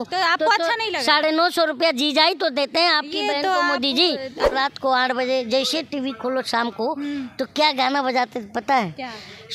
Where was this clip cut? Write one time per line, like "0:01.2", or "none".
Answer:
0:04.5